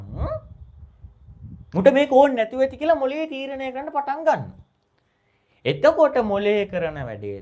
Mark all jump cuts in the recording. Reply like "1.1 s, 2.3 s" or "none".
none